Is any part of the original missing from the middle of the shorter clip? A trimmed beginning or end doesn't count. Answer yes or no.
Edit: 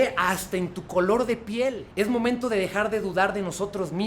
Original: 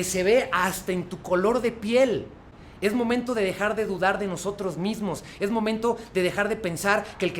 yes